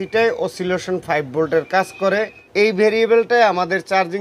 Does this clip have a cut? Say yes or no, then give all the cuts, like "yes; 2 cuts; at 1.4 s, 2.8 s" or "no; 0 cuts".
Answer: yes; 1 cut; at 2.4 s